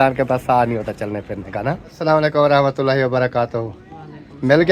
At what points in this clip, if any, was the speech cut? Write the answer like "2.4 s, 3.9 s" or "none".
1.9 s

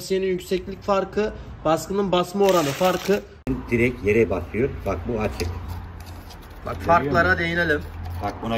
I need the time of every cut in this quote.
3.4 s

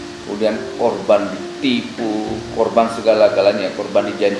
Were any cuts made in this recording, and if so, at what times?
none

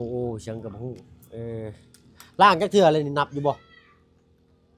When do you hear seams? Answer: none

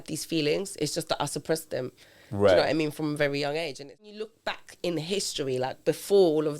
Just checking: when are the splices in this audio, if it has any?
4.1 s

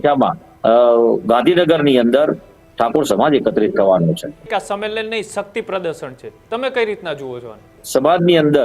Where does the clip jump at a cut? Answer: 4.5 s, 7.7 s

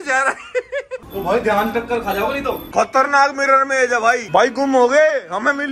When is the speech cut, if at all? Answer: 4.2 s

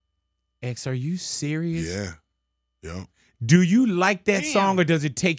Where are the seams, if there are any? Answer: none

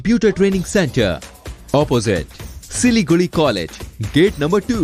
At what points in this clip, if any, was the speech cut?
none

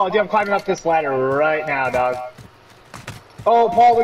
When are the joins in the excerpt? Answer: none

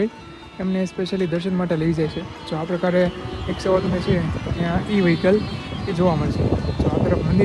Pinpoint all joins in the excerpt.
none

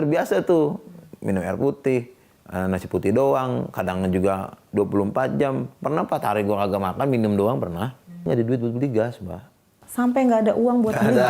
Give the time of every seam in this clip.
8.2 s

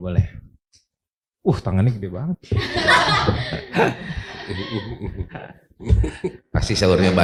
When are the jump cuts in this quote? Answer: none

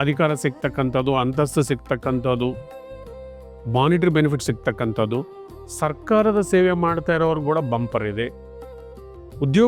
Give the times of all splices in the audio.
none

